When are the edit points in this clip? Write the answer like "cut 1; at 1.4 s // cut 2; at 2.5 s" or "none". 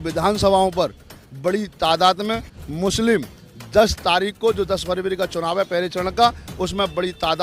none